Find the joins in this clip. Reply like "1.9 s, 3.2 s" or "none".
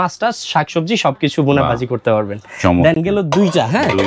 none